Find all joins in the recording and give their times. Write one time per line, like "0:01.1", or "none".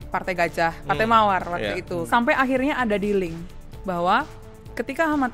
0:02.0